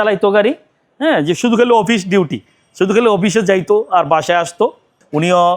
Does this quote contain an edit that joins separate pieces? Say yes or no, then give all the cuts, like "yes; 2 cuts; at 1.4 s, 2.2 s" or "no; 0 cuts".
no; 0 cuts